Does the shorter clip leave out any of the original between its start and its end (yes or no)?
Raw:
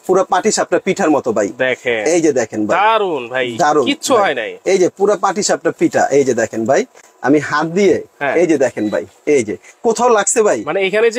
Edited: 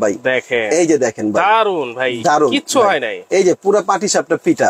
no